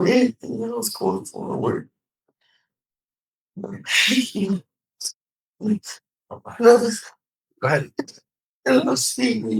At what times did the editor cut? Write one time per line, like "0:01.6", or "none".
none